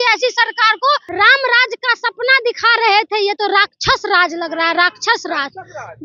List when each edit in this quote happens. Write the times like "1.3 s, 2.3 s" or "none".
1.1 s